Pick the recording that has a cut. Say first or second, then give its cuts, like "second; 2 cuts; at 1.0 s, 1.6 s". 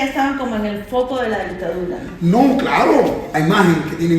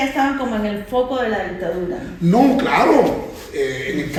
first; 1 cut; at 3.3 s